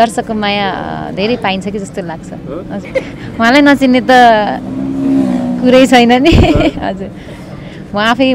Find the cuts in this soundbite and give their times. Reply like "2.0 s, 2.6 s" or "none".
2.9 s